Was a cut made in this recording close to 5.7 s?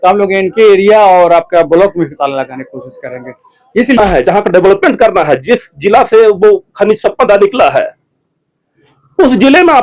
no; 1 cut; at 4.0 s

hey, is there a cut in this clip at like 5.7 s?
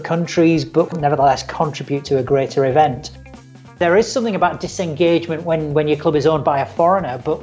no; 3 cuts; at 0.9 s, 2.0 s, 3.6 s

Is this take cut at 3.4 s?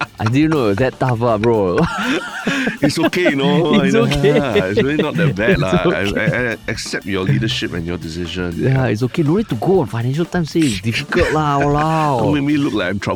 no; 0 cuts

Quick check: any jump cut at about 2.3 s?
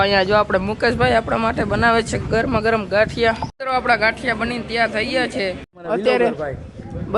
no; 2 cuts; at 3.5 s, 5.7 s

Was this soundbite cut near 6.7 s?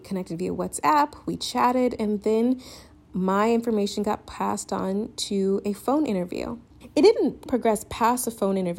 yes; 1 cut; at 6.7 s

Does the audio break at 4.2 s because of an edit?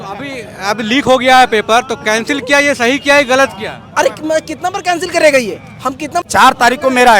no; 1 cut; at 6.2 s

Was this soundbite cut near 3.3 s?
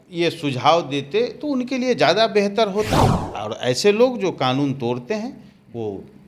yes; 1 cut; at 3.3 s

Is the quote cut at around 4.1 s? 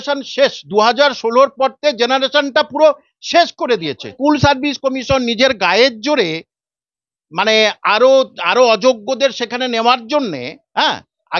yes; 1 cut; at 4.1 s

